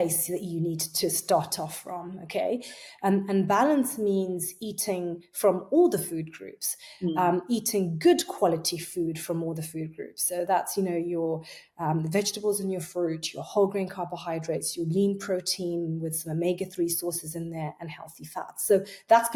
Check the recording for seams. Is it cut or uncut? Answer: uncut